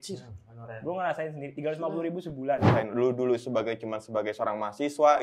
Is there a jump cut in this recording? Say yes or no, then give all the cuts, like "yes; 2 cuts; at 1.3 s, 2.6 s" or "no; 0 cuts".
yes; 1 cut; at 2.7 s